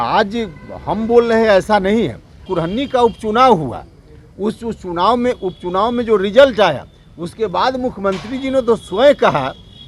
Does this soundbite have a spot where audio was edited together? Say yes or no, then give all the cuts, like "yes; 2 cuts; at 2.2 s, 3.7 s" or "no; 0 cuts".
yes; 1 cut; at 2.5 s